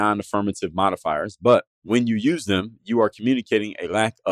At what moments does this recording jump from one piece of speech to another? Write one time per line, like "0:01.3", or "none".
0:01.8

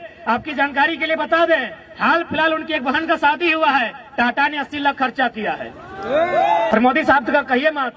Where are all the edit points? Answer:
0:06.7

